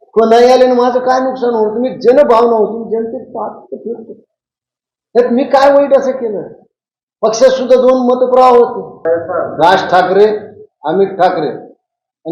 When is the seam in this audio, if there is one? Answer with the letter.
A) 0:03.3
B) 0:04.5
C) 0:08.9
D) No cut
C